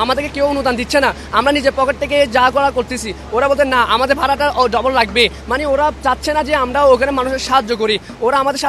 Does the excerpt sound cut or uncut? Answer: uncut